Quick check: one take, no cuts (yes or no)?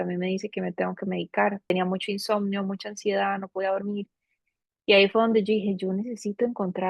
no